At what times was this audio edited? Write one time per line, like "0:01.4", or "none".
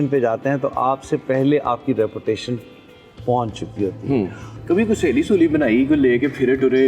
0:04.5